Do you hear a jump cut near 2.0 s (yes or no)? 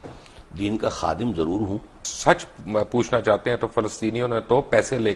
yes